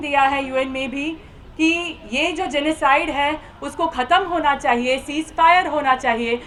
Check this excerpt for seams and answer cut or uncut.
uncut